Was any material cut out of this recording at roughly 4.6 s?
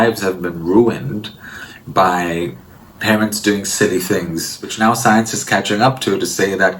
yes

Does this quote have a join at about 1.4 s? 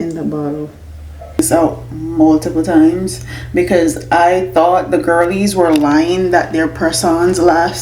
yes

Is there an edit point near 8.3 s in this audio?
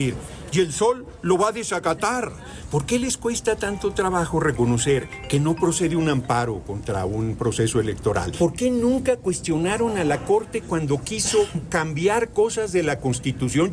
yes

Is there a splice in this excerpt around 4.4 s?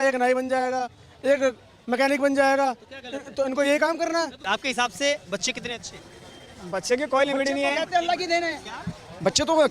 yes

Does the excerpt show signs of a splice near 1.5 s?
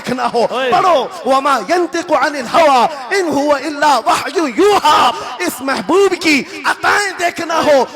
no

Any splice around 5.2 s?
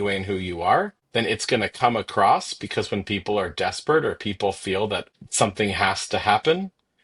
yes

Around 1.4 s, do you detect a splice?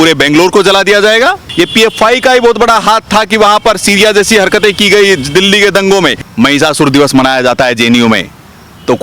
yes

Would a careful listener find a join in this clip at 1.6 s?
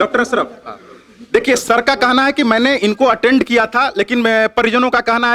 yes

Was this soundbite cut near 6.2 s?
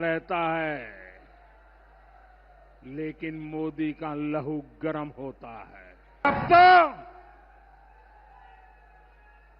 yes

